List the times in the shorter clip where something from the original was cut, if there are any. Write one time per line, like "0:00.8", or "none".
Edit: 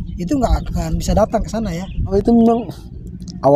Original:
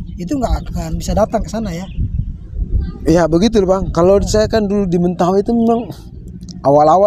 0:02.1